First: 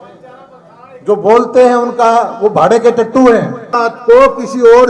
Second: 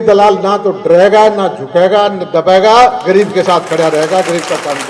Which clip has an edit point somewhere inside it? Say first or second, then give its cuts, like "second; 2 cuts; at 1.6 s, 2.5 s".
first; 1 cut; at 3.7 s